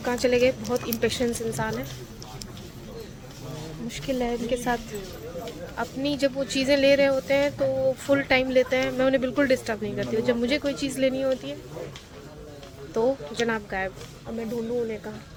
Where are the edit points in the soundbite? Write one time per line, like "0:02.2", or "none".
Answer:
none